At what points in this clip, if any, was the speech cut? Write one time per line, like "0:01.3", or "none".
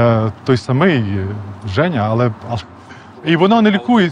0:03.2